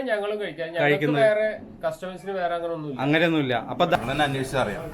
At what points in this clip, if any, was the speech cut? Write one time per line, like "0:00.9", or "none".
0:04.0

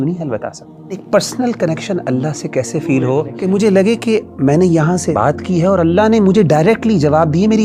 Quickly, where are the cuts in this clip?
0:01.0
0:03.3
0:05.2

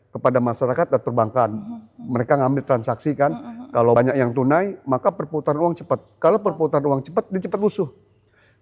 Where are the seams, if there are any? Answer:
0:04.0

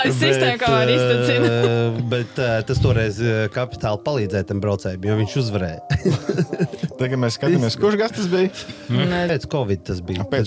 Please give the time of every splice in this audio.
0:09.3

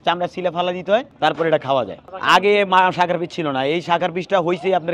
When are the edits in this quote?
0:01.1
0:02.0

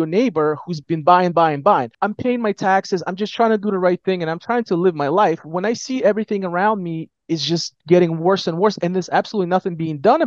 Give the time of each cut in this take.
0:02.0

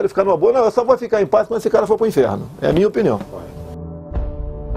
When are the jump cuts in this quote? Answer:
none

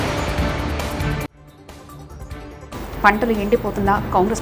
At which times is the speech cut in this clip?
none

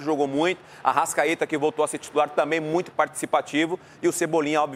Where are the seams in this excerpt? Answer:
none

